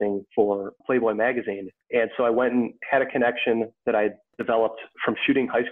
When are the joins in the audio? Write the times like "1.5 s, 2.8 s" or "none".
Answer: 1.6 s, 2.8 s